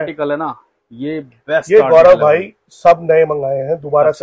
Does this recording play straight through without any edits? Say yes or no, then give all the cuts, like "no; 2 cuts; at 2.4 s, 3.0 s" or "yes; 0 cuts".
yes; 0 cuts